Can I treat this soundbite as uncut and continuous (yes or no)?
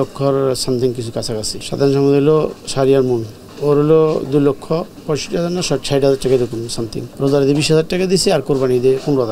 no